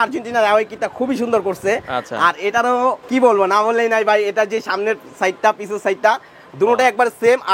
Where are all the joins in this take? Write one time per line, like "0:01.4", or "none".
0:03.0